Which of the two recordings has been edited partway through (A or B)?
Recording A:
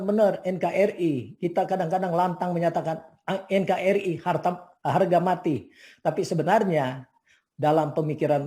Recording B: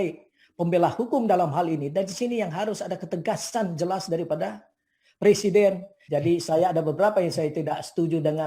B